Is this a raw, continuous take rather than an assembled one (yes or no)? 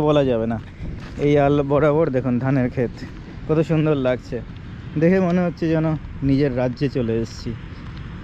yes